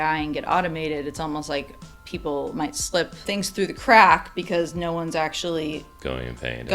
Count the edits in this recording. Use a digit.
1